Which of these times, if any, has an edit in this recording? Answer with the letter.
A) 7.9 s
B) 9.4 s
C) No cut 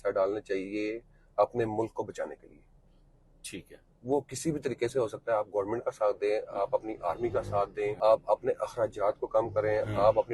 A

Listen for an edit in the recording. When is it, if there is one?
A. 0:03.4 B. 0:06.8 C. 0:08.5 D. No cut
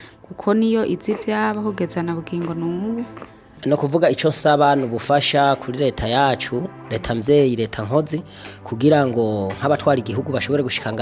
A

